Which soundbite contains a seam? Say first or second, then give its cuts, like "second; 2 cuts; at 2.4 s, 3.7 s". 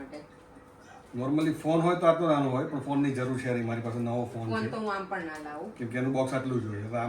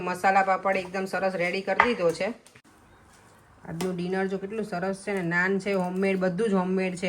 second; 1 cut; at 2.4 s